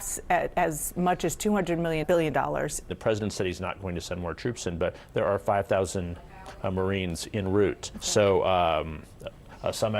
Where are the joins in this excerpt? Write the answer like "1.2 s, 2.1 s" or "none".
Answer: 2.9 s, 7.9 s